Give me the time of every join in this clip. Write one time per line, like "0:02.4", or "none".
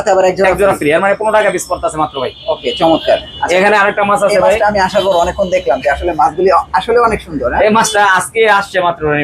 none